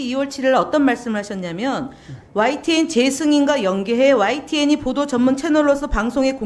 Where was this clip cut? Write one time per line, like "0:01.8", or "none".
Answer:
none